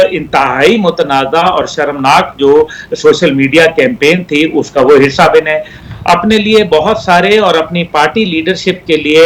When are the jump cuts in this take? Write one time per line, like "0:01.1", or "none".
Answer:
0:05.7